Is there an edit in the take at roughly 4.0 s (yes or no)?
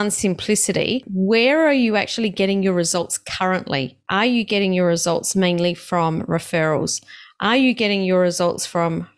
yes